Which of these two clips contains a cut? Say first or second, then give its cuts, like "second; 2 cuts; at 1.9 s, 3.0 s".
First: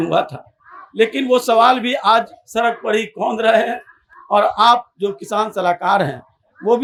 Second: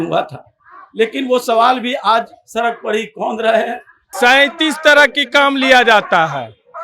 second; 1 cut; at 4.0 s